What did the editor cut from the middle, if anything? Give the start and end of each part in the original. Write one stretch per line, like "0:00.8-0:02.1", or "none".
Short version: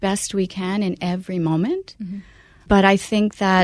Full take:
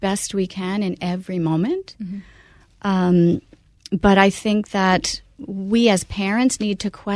0:02.7-0:04.0